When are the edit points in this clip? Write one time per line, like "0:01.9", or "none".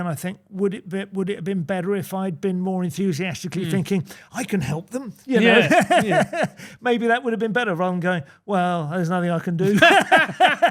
none